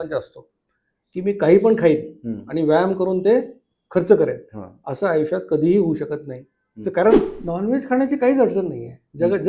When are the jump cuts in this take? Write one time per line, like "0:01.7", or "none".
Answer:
0:07.1